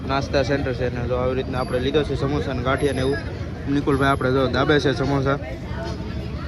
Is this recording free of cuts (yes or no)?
yes